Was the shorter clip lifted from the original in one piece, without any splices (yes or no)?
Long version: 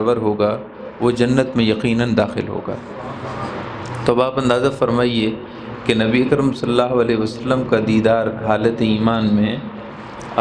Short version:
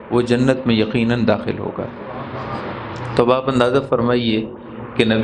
yes